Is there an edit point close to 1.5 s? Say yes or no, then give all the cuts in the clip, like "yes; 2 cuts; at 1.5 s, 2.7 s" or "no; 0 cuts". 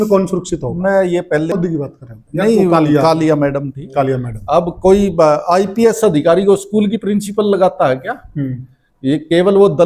yes; 1 cut; at 1.5 s